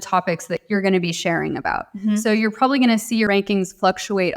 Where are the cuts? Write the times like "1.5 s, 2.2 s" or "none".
3.3 s